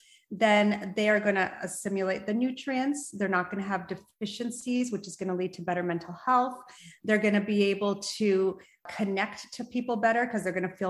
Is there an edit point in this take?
no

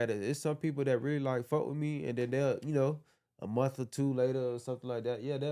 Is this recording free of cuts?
yes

